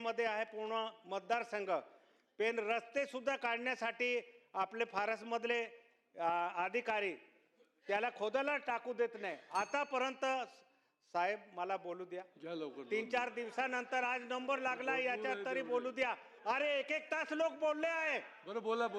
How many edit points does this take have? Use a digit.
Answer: 0